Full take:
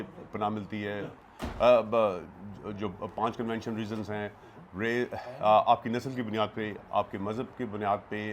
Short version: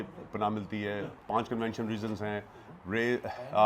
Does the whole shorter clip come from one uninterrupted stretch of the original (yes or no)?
no